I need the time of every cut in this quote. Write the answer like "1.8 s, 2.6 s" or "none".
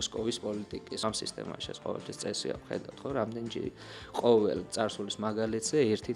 1.0 s